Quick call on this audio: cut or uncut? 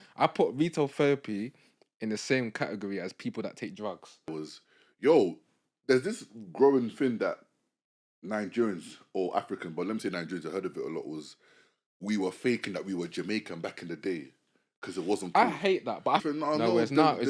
cut